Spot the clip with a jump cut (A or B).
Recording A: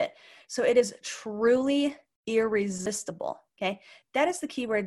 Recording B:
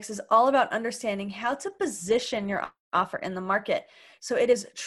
A